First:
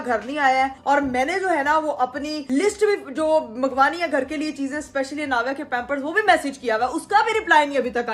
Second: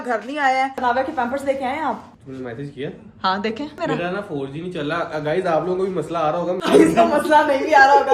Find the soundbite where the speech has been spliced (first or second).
second